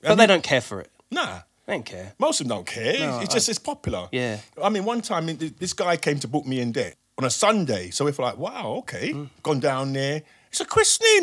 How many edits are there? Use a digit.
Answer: 1